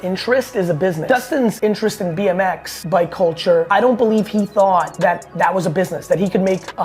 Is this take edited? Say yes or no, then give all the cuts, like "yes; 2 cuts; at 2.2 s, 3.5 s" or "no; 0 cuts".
yes; 4 cuts; at 1.3 s, 2.7 s, 3.7 s, 4.9 s